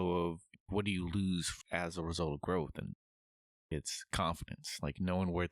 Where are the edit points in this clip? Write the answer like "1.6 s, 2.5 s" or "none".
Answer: 3.7 s